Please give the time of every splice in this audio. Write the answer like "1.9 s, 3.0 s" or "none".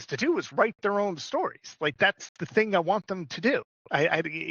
none